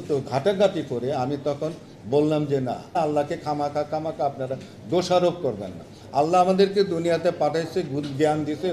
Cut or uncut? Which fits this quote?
cut